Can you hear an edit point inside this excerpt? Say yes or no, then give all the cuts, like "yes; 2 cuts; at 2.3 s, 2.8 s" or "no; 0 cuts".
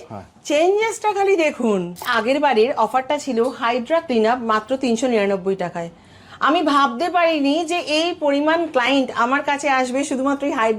yes; 1 cut; at 2.1 s